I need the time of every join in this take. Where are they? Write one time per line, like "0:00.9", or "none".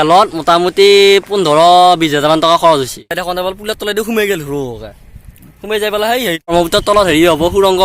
0:03.1
0:06.5